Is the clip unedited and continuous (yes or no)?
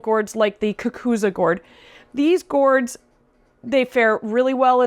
yes